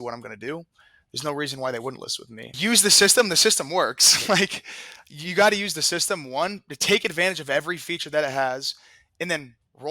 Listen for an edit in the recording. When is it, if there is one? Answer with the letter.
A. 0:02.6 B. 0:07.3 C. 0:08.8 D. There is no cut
A